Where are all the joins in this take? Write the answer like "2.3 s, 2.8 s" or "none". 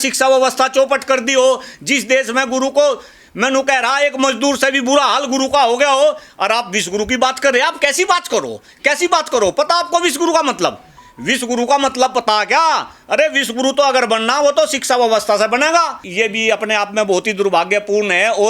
16.0 s